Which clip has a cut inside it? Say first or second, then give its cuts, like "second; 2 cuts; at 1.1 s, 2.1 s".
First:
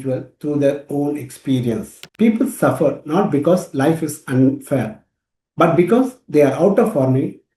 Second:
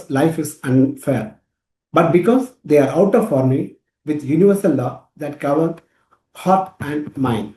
first; 1 cut; at 2.0 s